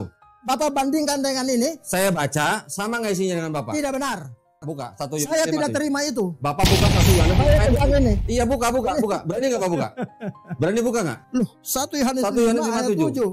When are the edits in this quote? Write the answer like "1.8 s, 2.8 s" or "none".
4.6 s